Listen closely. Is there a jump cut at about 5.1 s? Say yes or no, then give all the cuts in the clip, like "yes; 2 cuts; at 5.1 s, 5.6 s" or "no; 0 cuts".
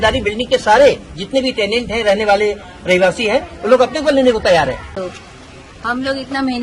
yes; 1 cut; at 5.1 s